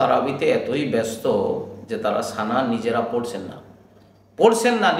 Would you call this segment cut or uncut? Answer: uncut